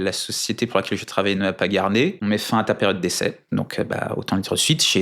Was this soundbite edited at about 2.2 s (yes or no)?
yes